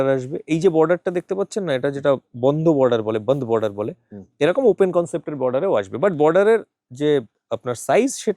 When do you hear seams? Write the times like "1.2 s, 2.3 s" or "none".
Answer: none